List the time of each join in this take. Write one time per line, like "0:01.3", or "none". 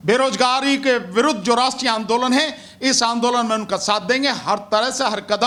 none